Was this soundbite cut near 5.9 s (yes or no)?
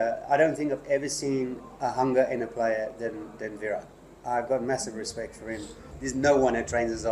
yes